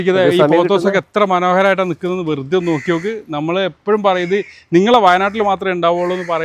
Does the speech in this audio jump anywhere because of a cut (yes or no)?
no